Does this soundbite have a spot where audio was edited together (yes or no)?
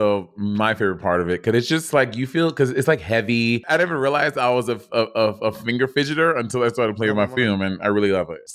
yes